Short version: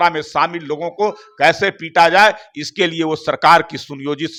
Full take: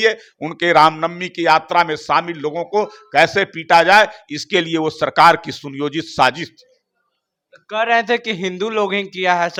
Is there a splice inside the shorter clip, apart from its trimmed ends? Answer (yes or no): no